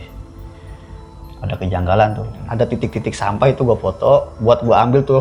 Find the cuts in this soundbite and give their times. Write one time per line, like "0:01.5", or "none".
0:02.4